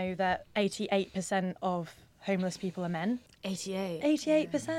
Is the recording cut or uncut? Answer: cut